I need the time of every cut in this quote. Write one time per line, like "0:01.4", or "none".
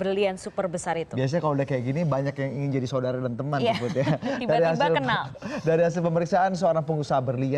0:03.9